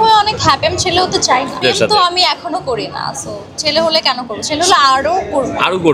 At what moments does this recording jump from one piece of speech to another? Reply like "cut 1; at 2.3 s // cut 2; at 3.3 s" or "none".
cut 1; at 1.6 s